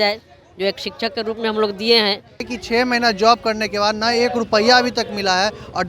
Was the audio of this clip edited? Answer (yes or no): yes